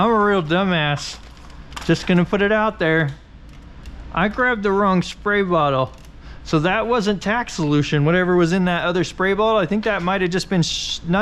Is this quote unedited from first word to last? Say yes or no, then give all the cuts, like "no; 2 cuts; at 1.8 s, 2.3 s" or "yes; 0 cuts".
yes; 0 cuts